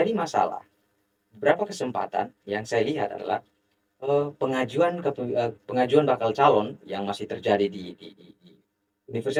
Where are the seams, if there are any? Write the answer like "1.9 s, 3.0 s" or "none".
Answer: none

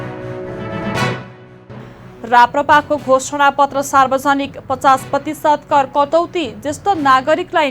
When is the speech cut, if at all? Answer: 1.6 s

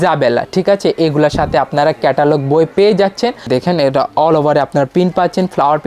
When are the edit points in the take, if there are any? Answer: 3.5 s

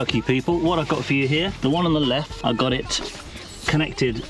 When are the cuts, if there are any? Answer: 1.5 s, 2.3 s

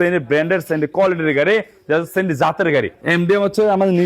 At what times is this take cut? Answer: 3.0 s

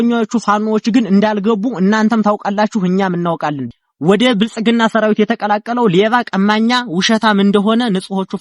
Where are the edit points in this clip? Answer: 3.6 s

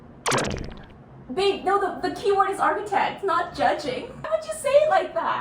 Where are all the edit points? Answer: 4.3 s

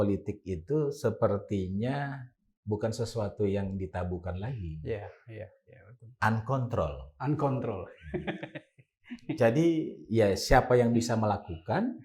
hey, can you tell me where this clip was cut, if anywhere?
none

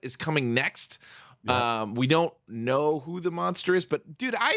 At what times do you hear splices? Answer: none

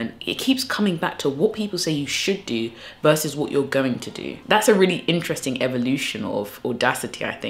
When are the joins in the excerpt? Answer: 4.3 s

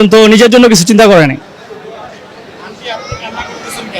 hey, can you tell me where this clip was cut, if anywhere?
none

